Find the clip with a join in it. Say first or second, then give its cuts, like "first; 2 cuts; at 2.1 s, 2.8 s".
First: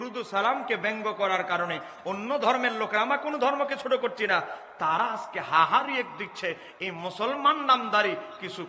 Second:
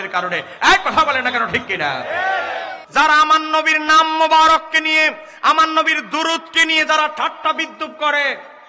second; 1 cut; at 2.8 s